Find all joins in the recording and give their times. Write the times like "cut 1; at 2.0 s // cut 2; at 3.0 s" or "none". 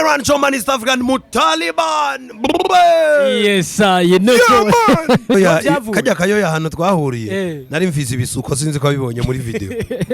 cut 1; at 5.3 s